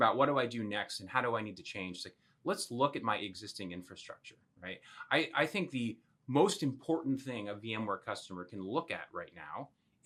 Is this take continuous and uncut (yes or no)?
yes